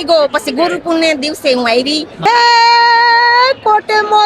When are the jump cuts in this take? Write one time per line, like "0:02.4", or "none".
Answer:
0:02.1